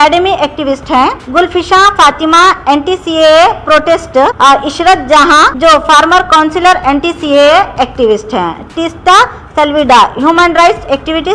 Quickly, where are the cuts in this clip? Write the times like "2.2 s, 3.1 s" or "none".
1.2 s, 4.3 s, 5.5 s